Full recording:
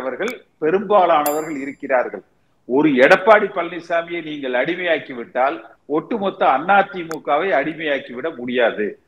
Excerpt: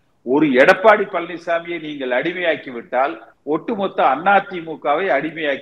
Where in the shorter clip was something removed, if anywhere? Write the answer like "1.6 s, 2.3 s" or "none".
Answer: none

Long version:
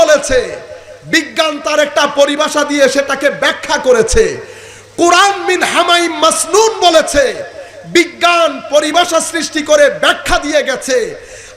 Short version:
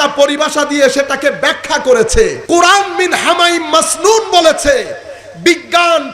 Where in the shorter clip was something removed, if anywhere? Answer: 2.4 s

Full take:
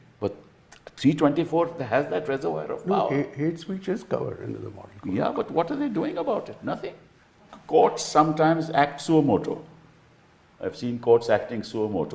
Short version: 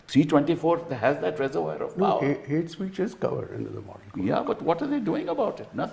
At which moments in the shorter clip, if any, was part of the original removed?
none

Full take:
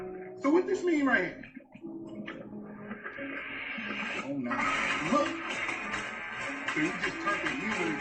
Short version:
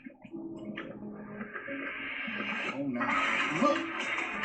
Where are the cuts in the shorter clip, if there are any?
none

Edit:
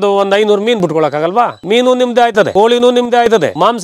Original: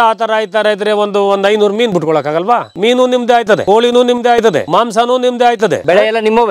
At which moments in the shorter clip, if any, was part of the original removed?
none

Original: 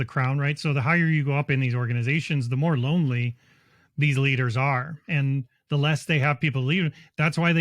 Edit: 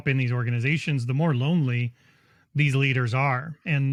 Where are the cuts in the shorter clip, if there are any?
none

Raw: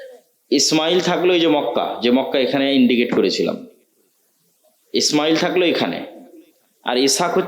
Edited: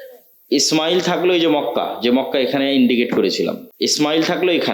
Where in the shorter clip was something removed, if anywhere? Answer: 3.7 s

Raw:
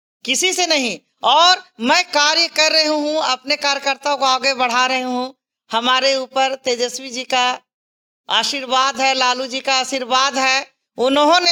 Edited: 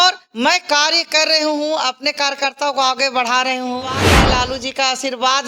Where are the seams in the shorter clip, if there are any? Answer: 4.2 s

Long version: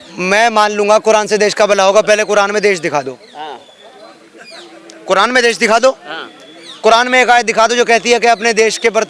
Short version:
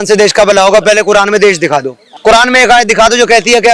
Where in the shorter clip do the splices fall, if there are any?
2.0 s

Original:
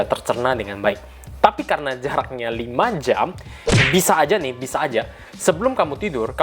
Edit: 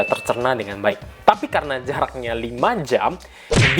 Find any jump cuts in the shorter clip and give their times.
1.1 s

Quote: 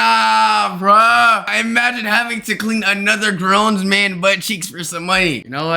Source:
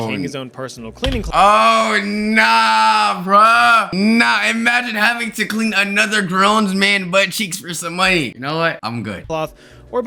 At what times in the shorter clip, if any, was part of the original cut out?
1.5 s

